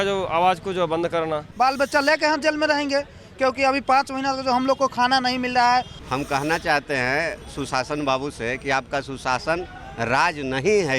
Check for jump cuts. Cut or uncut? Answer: cut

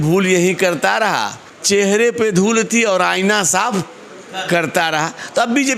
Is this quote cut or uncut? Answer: uncut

